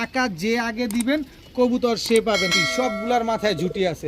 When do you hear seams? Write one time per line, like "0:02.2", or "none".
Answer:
0:02.5